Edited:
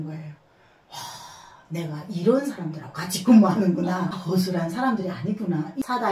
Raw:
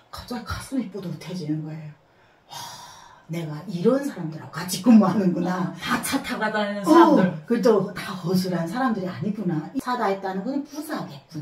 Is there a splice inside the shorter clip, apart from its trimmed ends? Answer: yes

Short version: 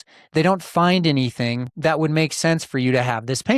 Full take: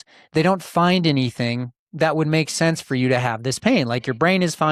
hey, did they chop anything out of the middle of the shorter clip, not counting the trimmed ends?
yes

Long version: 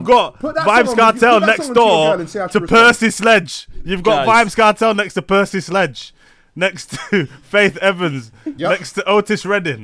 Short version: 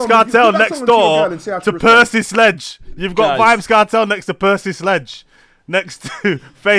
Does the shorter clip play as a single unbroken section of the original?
yes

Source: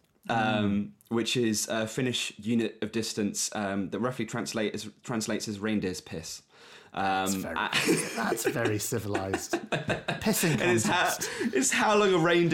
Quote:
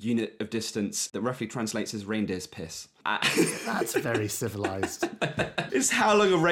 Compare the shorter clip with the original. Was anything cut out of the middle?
yes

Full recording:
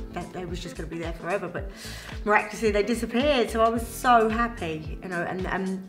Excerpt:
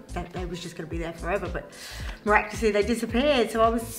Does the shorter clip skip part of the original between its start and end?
no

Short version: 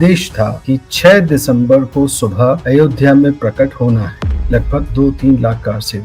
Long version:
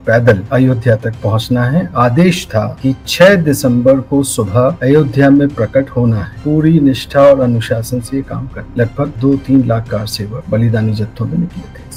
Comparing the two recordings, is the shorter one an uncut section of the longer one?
no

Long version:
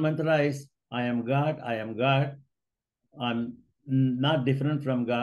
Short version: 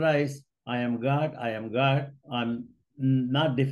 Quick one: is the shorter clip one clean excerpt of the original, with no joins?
no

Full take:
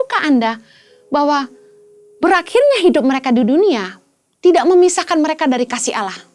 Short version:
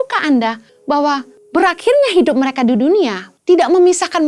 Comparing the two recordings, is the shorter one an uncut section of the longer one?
no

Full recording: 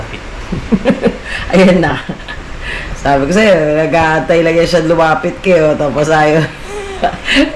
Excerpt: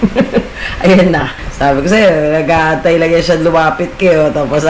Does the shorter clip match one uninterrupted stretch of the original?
no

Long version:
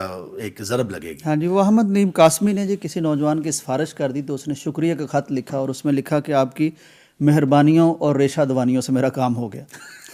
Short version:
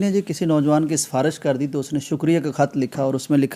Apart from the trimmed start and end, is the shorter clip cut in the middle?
no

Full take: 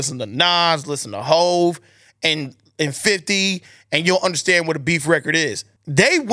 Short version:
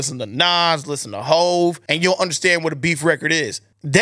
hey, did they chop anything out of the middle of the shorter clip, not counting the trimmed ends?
yes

